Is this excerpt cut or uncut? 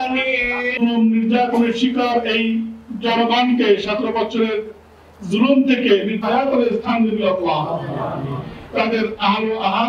uncut